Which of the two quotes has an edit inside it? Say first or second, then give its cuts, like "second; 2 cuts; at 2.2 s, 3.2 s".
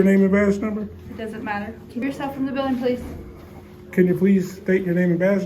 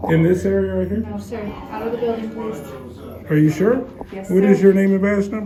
first; 1 cut; at 2.0 s